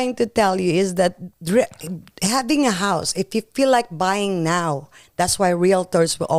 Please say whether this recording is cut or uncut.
uncut